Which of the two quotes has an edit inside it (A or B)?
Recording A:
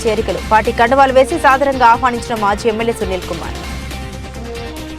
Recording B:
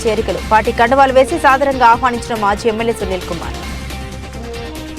A